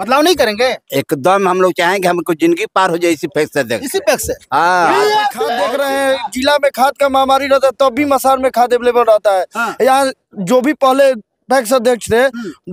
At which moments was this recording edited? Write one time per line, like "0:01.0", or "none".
0:05.6